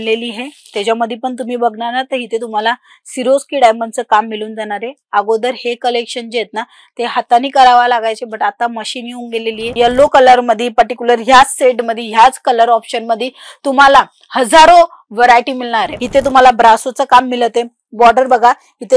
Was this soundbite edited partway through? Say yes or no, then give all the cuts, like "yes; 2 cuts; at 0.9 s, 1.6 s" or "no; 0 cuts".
yes; 2 cuts; at 9.7 s, 16.0 s